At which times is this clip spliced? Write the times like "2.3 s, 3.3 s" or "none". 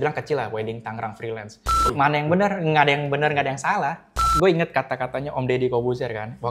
1.8 s, 4.2 s